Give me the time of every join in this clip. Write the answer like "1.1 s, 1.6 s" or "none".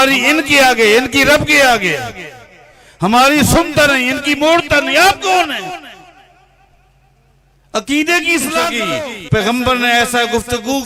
8.8 s